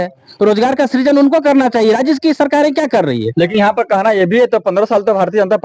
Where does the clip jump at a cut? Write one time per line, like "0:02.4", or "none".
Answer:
none